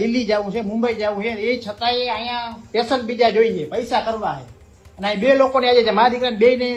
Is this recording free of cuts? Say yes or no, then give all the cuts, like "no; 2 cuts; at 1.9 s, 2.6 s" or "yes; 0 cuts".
yes; 0 cuts